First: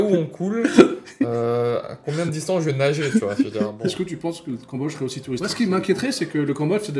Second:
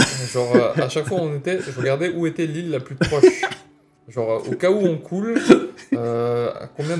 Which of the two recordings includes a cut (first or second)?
first